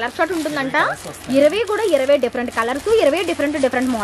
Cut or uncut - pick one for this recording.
uncut